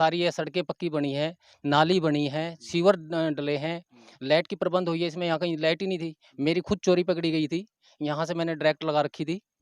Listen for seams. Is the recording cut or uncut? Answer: uncut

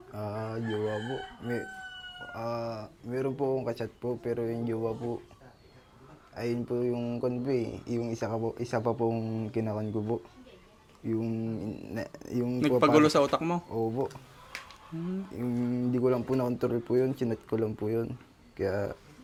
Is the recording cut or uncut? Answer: uncut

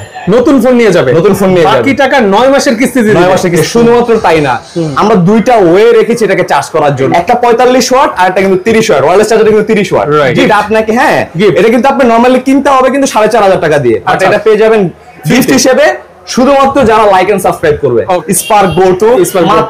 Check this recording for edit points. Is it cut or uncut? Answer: cut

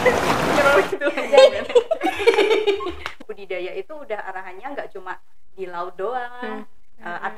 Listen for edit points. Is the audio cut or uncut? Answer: cut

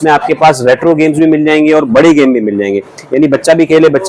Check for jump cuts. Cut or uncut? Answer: uncut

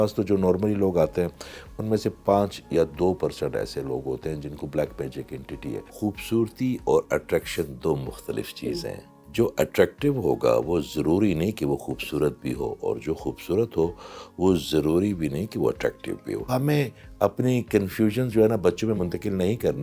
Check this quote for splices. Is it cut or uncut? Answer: cut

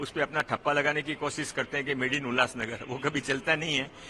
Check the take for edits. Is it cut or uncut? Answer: uncut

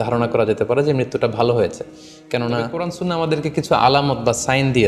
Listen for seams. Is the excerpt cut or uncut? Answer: cut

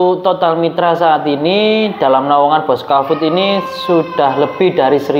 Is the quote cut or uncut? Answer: uncut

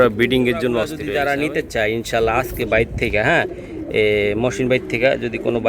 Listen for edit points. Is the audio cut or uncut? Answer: cut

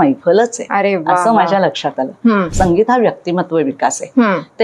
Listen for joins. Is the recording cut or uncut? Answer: cut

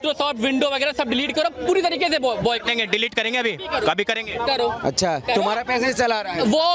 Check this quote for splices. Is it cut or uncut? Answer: uncut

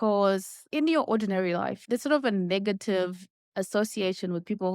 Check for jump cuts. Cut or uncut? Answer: uncut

